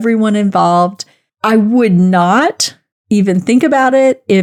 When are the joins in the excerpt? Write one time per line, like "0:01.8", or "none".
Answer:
none